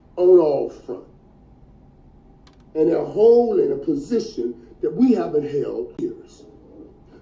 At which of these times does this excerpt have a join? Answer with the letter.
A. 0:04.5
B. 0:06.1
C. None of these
B